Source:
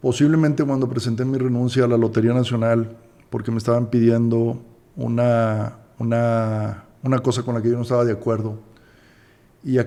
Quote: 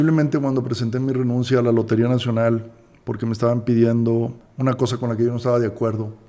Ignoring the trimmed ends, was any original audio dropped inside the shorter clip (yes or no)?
yes